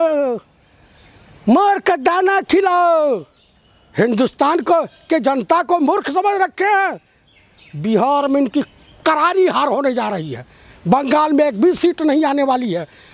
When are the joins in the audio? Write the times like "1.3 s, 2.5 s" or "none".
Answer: none

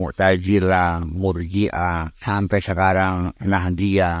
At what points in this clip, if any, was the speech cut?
2.1 s

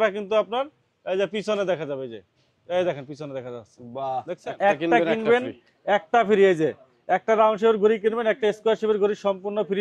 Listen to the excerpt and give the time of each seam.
4.4 s

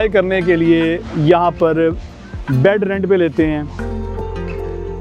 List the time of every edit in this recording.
3.8 s

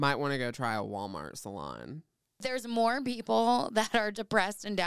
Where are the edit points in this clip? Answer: 2.4 s

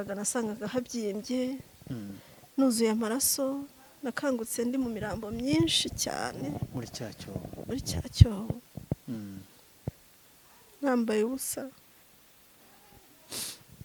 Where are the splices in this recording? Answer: none

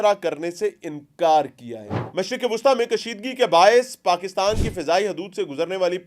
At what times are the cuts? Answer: 2.0 s

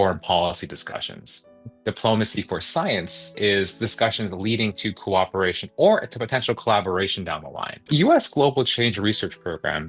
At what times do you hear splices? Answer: 7.9 s

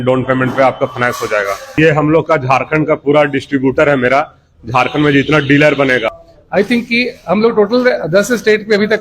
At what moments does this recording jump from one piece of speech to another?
1.7 s, 6.2 s

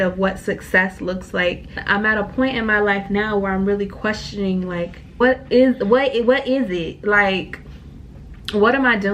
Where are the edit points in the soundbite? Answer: 1.8 s, 5.2 s

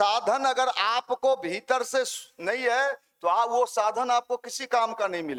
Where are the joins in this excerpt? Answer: none

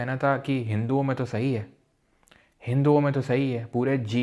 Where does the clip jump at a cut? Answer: none

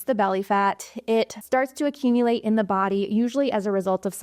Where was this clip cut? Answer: 1.4 s

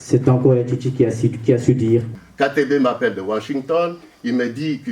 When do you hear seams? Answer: 2.1 s

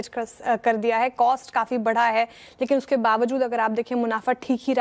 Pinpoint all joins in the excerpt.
3.4 s

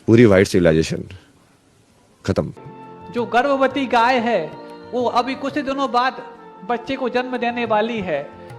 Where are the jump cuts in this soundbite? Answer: 2.6 s

